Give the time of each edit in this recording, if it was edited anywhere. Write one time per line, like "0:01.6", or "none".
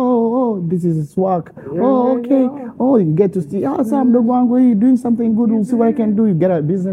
none